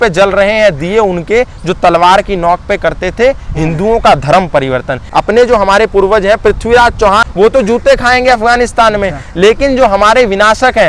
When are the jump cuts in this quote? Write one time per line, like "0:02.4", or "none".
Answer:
0:05.1
0:07.3